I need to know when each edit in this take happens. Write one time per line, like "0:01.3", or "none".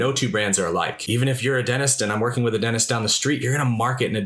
0:01.0